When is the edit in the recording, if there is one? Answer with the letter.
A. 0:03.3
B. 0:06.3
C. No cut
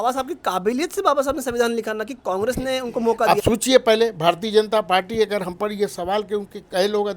A